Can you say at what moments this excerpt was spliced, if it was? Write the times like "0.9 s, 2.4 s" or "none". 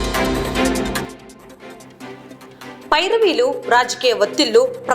2.8 s